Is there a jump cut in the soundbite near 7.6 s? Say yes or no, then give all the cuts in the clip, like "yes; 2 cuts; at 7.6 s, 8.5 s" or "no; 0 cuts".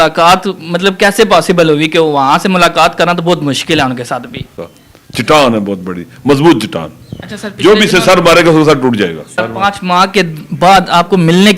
no; 2 cuts; at 4.6 s, 9.3 s